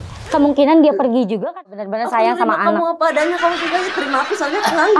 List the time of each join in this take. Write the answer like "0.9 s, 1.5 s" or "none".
1.7 s